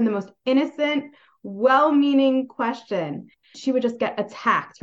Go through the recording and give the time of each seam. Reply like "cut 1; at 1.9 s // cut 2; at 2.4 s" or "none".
none